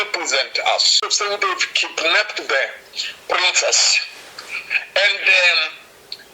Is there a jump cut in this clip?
yes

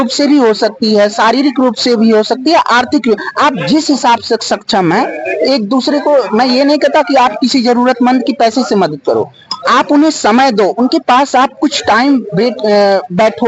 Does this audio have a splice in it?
no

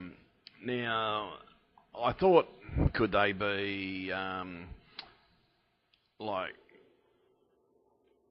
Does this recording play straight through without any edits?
no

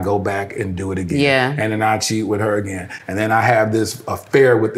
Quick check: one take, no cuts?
yes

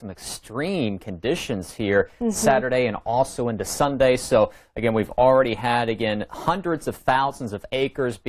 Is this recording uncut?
no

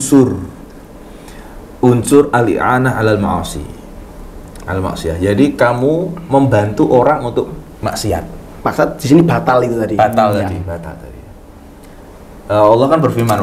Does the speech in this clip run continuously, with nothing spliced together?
yes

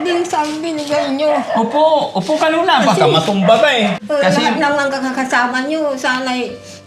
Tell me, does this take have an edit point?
yes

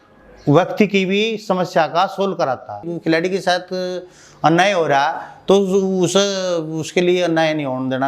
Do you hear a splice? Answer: yes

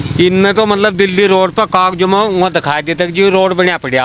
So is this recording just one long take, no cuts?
yes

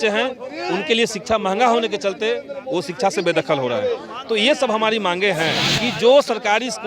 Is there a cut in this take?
yes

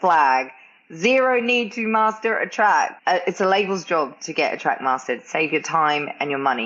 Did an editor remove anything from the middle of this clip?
yes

